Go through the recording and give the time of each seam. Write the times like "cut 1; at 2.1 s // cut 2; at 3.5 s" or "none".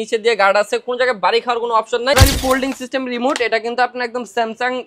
cut 1; at 2.2 s